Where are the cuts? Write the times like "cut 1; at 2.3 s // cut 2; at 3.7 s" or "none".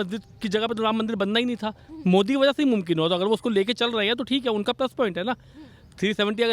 none